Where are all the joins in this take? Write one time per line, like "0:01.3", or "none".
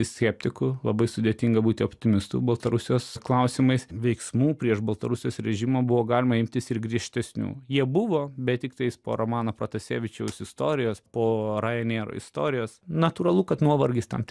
0:03.2
0:03.9
0:11.0
0:12.8